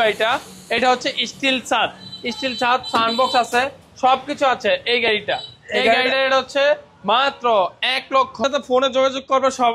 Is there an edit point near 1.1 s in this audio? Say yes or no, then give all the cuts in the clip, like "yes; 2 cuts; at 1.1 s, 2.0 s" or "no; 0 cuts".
no; 1 cut; at 8.4 s